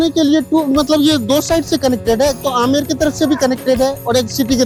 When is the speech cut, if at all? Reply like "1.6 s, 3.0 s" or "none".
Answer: none